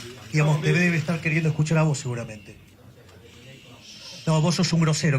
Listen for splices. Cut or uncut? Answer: cut